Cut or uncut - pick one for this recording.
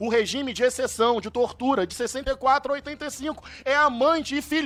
uncut